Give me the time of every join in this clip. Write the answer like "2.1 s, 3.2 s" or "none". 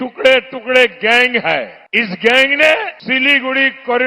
1.8 s, 3.0 s